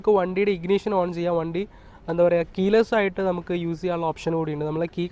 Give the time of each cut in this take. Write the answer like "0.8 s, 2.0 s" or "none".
none